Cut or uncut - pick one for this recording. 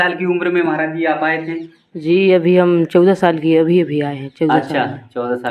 uncut